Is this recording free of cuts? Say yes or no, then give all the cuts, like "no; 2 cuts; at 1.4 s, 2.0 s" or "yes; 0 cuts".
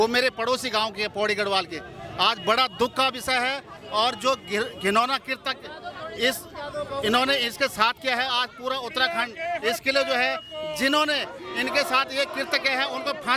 yes; 0 cuts